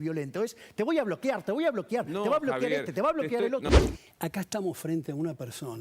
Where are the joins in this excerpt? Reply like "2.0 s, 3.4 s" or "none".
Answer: 3.7 s